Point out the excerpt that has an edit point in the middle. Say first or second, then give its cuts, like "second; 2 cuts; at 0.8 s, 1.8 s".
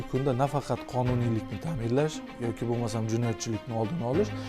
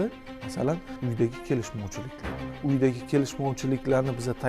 second; 2 cuts; at 1.0 s, 2.6 s